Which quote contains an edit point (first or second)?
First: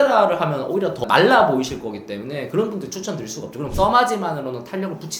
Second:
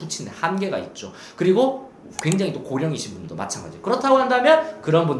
first